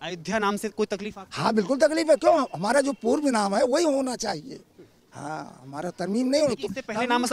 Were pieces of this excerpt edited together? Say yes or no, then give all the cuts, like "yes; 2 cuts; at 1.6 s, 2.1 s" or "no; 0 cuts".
no; 0 cuts